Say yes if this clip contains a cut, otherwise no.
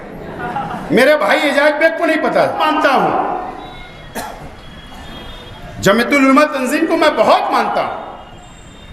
yes